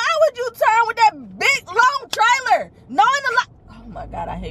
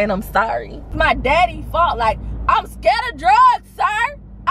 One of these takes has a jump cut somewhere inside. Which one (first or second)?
second